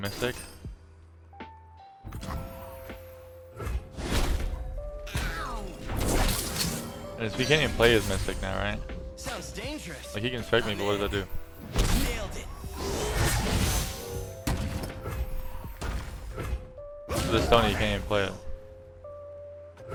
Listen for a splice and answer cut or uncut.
uncut